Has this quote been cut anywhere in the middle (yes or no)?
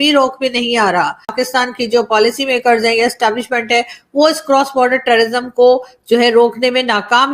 yes